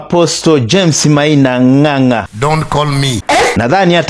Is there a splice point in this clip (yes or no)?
yes